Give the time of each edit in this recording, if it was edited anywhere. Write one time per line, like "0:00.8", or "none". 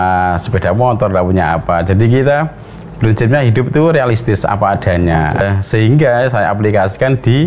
0:05.4

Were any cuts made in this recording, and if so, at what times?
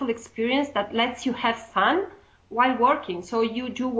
0:02.3

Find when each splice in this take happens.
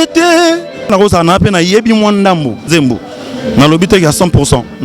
0:00.9
0:02.7

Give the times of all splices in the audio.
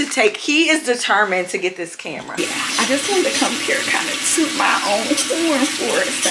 0:02.3

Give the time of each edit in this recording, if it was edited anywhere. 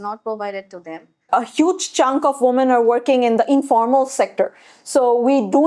0:01.2

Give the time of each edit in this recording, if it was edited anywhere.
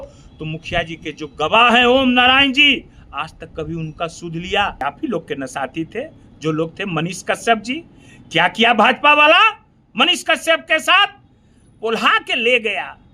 0:04.8

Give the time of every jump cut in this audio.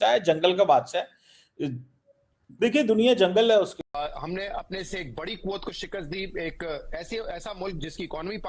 0:03.8

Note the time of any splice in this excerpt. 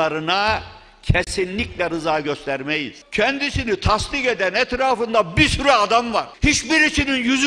0:02.9
0:06.3

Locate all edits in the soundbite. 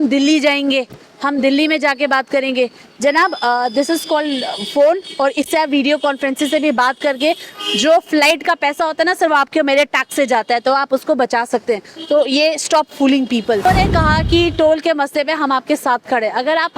0:13.7

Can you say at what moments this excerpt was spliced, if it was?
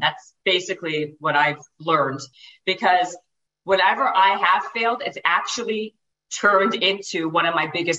0:02.2

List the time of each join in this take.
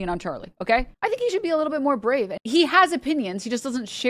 0:00.9
0:02.3

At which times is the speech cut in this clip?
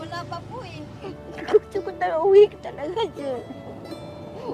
0:01.0

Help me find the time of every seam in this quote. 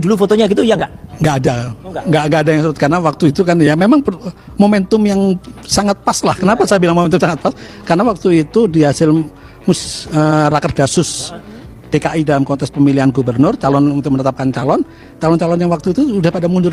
none

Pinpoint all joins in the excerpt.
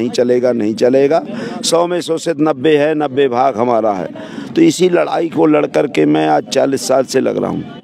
none

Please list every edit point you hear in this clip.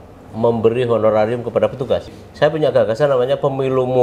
0:02.2

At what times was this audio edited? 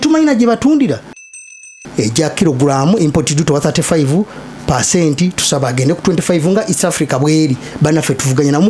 0:01.4

